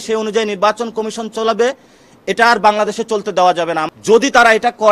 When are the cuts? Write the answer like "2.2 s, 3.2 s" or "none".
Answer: 3.9 s